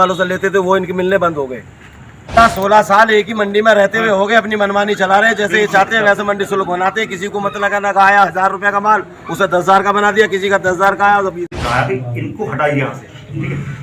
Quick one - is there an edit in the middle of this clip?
yes; 2 cuts; at 2.4 s, 11.5 s

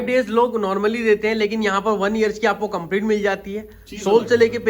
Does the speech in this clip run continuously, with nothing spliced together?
yes; 0 cuts

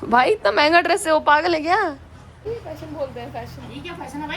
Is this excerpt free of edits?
no; 1 cut; at 2.5 s

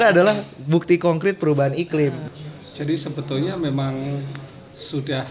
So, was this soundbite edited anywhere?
yes; 1 cut; at 2.2 s

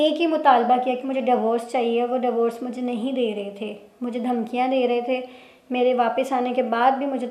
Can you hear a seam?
no; 0 cuts

